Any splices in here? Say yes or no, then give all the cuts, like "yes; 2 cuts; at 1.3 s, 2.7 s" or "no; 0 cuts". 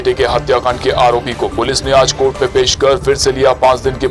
no; 0 cuts